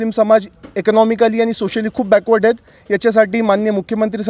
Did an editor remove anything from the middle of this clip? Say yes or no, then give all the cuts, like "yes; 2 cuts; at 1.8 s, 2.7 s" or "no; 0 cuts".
no; 0 cuts